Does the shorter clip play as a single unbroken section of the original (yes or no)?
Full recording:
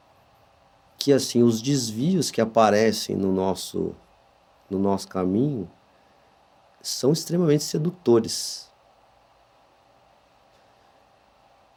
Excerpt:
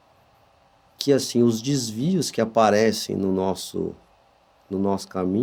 yes